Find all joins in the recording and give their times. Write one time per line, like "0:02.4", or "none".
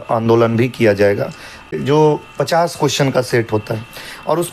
0:01.7